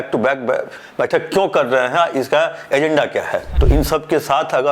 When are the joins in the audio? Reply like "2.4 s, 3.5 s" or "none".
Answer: 3.5 s